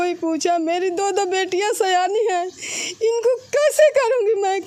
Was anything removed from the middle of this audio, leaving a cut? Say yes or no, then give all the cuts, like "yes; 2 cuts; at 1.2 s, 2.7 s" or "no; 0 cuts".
no; 0 cuts